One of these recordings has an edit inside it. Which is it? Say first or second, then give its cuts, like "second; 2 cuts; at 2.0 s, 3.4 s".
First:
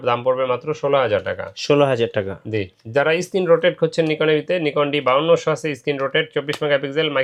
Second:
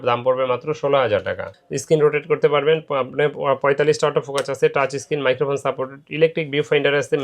second; 1 cut; at 1.5 s